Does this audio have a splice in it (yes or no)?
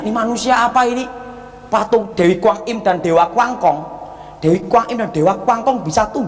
yes